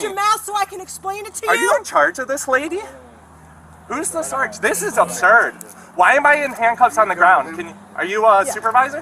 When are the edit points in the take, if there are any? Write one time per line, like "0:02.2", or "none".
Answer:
none

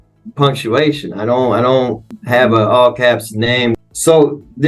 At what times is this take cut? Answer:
0:02.1
0:03.8

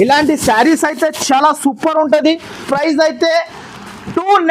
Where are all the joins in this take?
0:02.7

